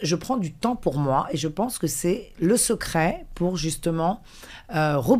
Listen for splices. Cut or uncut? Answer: uncut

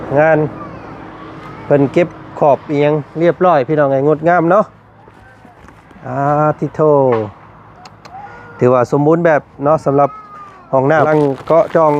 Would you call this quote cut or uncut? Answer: cut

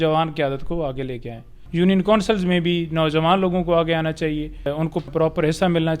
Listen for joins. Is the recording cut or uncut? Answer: cut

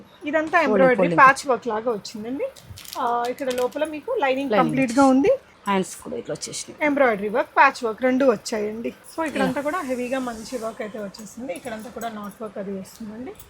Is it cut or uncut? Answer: cut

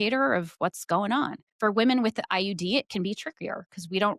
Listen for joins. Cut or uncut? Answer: cut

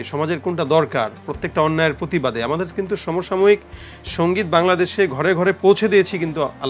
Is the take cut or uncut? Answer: uncut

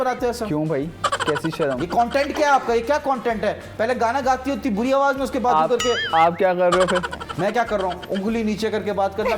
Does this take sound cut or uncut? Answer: uncut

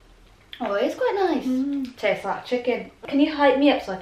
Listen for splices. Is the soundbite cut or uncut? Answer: cut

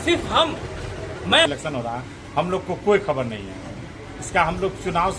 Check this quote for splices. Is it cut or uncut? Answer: cut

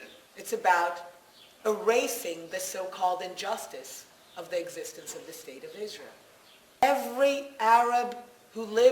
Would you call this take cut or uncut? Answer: cut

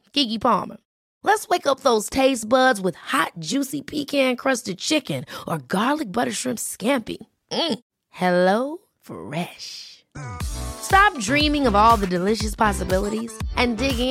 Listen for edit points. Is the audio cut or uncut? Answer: uncut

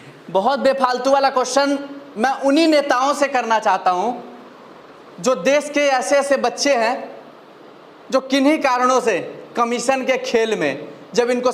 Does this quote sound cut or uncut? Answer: uncut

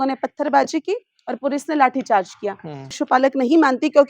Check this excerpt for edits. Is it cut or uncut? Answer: cut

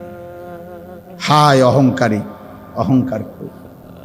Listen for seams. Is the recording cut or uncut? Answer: cut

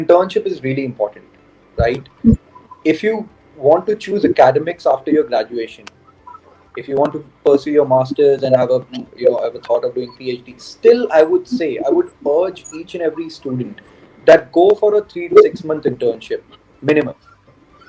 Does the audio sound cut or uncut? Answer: uncut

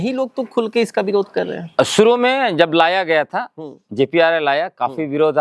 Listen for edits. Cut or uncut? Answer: uncut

